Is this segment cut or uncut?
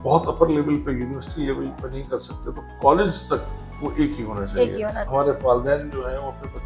cut